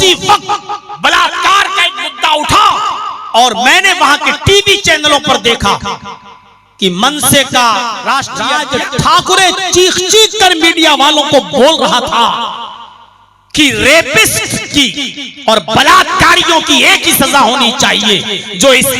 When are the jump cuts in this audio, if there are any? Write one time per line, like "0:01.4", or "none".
0:08.6